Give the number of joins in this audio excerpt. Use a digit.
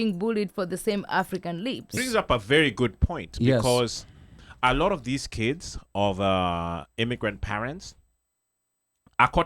1